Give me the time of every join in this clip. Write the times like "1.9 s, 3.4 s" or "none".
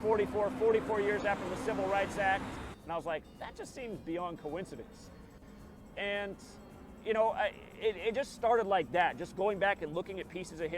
8.3 s